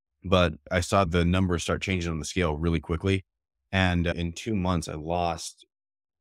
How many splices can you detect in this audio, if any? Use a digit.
2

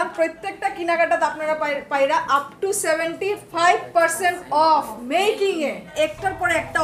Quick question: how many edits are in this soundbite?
1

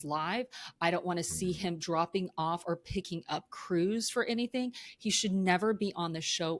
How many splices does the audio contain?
0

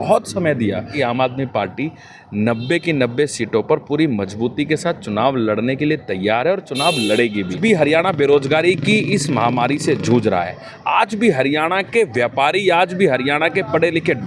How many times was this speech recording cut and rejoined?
2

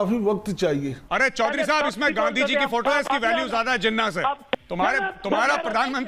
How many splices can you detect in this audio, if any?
2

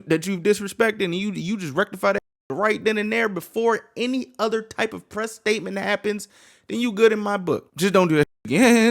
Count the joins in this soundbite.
1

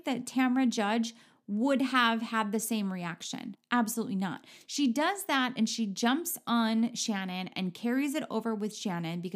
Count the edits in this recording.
1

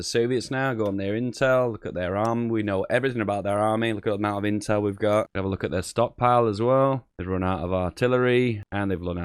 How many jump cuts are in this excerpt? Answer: 1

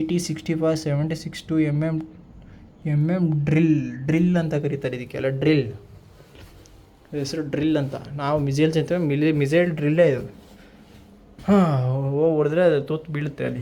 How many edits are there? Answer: 0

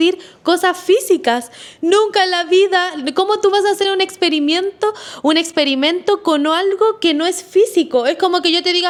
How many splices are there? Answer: 0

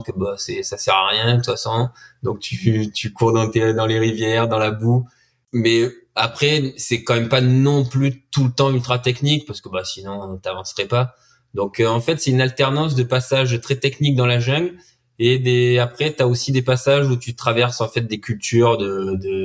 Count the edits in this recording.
1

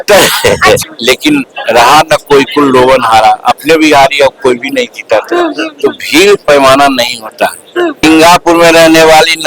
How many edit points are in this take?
2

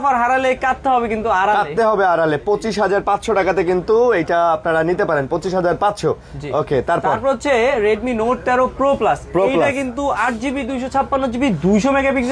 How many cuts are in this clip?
0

